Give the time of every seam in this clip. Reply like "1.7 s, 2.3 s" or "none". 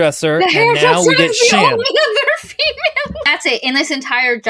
3.2 s

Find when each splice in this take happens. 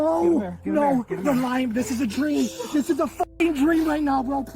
0.9 s

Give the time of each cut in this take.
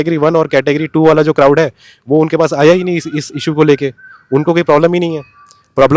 none

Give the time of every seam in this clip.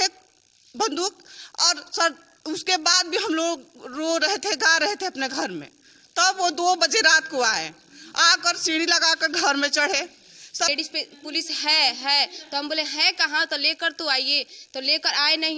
10.7 s

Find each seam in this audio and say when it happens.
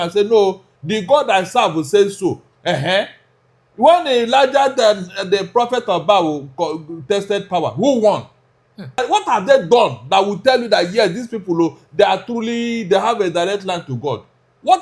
9.0 s

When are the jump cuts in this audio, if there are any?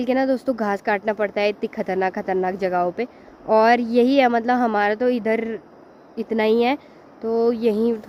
none

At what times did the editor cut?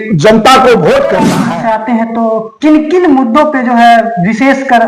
1.4 s

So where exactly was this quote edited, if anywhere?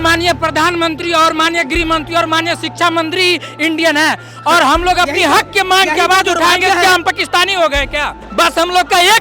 8.2 s

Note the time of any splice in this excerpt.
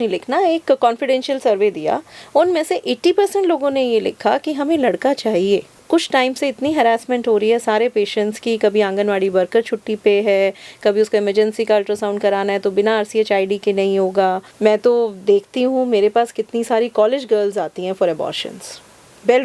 5.8 s, 14.5 s

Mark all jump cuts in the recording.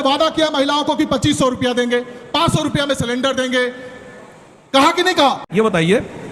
5.2 s

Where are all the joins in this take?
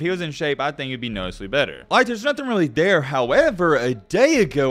1.8 s

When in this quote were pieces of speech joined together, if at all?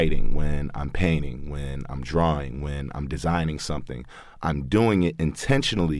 none

